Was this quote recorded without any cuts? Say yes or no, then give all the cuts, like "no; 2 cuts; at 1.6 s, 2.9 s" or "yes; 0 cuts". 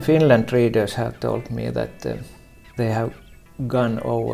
yes; 0 cuts